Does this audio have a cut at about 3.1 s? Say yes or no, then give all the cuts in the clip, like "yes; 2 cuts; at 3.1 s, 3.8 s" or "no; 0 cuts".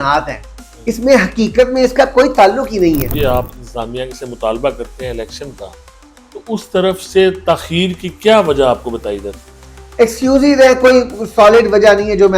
yes; 1 cut; at 3.1 s